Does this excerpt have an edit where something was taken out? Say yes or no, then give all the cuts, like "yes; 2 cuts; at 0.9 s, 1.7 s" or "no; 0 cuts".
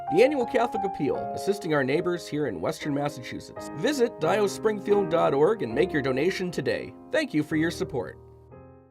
yes; 2 cuts; at 6.9 s, 8.1 s